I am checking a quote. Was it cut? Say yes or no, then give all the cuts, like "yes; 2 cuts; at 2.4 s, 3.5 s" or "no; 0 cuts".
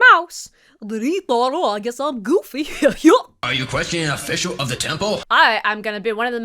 yes; 2 cuts; at 3.4 s, 5.2 s